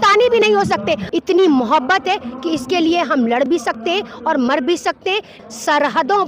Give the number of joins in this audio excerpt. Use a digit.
2